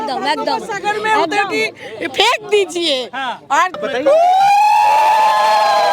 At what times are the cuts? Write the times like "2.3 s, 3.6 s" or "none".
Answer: 3.8 s